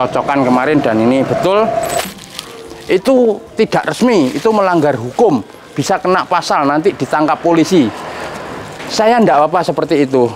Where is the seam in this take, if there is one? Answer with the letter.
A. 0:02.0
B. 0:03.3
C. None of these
A